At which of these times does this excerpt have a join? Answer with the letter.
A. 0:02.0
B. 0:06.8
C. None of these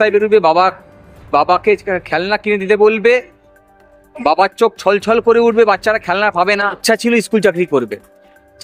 B